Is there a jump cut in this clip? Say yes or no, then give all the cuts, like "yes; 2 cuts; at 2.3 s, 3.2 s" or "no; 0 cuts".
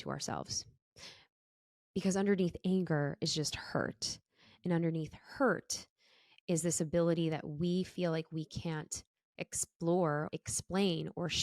yes; 1 cut; at 10.3 s